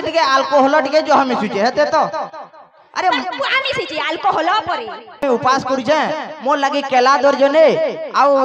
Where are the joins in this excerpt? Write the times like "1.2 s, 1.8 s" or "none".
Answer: 5.2 s